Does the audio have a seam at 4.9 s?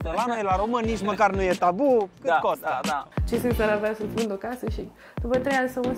no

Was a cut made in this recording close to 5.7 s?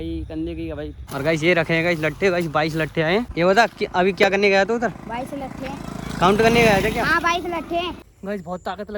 no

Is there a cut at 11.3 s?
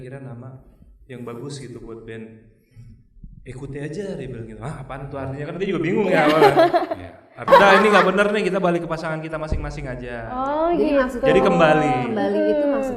no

